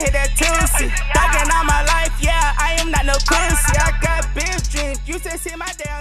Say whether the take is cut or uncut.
uncut